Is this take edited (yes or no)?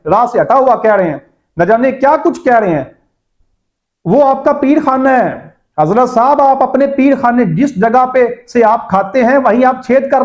no